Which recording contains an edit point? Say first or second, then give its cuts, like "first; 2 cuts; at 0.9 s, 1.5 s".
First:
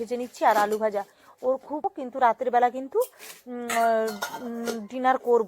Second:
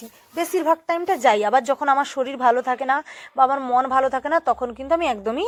first; 1 cut; at 1.9 s